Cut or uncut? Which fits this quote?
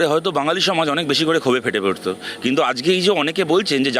uncut